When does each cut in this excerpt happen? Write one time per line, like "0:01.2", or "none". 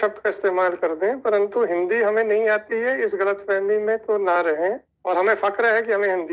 0:04.9

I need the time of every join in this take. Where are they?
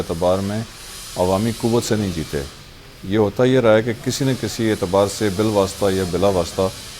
none

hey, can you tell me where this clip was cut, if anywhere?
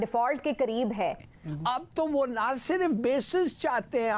0:01.2

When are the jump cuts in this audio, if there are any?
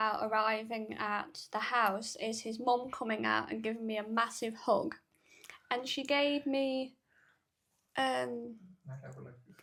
none

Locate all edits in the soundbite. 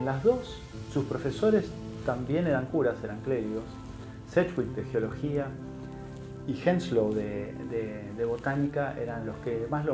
none

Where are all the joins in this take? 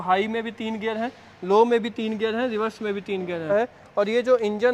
0:03.4

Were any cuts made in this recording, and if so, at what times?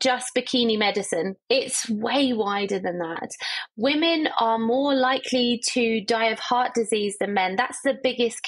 none

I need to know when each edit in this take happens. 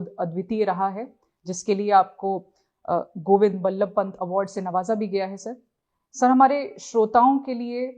none

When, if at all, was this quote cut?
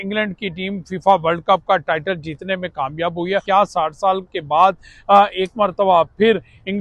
0:03.4

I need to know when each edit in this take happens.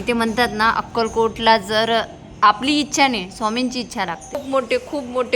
0:04.4

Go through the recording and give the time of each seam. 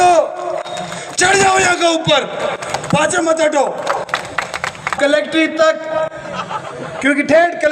0:05.0

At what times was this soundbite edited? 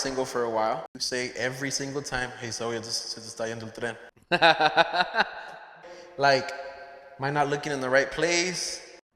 0:01.0
0:04.1
0:05.7

